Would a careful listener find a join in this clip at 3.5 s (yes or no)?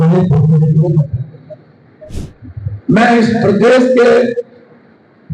no